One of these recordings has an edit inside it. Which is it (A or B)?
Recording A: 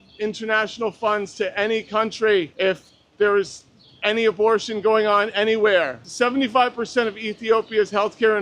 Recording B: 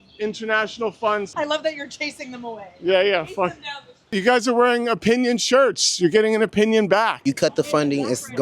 B